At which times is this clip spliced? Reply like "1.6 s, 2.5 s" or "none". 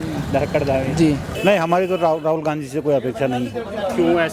1.3 s